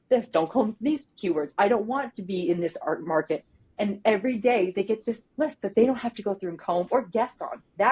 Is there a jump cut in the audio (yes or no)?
no